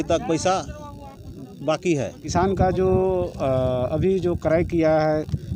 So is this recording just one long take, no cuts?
no; 1 cut; at 2.3 s

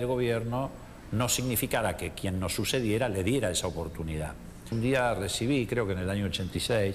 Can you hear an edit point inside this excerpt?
yes; 1 cut; at 4.7 s

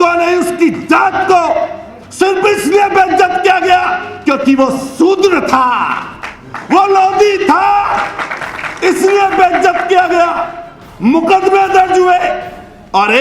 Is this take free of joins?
yes; 0 cuts

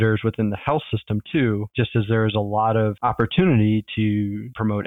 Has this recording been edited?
yes; 1 cut; at 3.0 s

